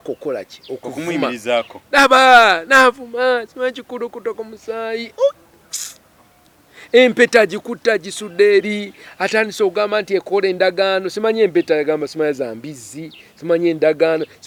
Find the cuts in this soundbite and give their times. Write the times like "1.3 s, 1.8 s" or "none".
none